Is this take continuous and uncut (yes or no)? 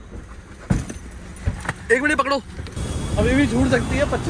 no